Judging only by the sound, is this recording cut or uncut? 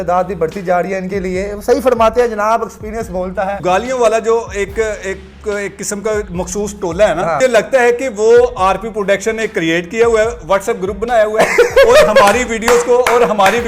cut